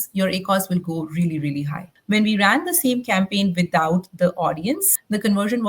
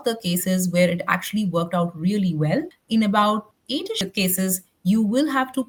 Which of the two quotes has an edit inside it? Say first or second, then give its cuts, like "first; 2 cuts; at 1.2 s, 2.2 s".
first; 1 cut; at 1.9 s